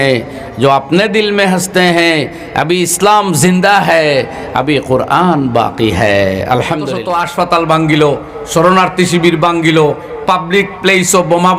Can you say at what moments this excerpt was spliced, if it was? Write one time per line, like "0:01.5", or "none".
0:07.0